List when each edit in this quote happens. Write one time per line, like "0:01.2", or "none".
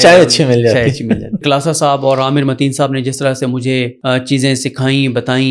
0:01.4
0:03.9